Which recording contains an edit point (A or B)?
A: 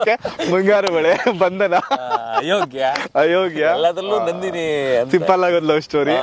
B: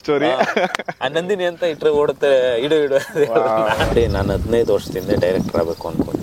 B